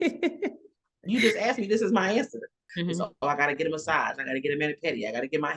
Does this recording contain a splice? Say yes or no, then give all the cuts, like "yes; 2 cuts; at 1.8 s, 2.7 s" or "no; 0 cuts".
yes; 1 cut; at 2.6 s